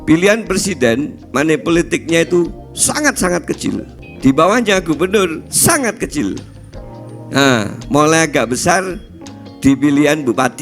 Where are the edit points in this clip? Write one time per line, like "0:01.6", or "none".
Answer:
0:04.0